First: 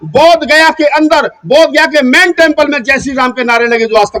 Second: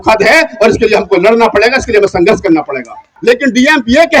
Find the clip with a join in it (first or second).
second